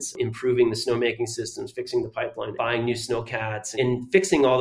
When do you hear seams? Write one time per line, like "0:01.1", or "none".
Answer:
0:02.5
0:03.6